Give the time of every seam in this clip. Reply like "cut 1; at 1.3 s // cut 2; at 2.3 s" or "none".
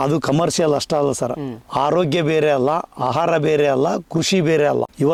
none